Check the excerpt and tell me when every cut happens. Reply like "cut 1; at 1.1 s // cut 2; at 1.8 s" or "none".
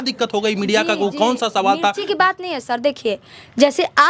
none